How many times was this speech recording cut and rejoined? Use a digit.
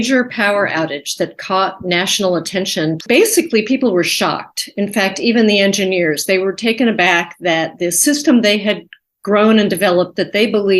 1